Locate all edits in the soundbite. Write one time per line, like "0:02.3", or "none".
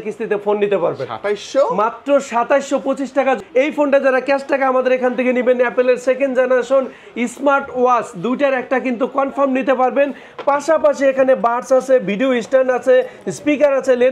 0:03.4